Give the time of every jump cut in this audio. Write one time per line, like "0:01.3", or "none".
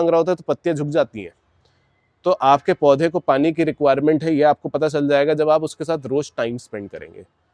none